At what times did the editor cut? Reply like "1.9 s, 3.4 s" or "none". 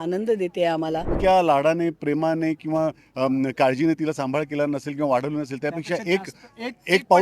1.1 s